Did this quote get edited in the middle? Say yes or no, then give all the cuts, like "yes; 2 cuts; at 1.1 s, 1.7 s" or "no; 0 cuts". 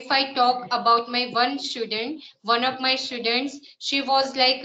no; 0 cuts